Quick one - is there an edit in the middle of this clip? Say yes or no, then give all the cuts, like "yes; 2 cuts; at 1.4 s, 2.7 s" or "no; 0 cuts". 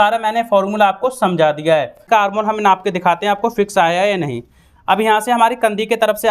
yes; 1 cut; at 2.0 s